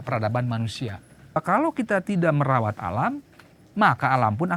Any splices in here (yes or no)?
yes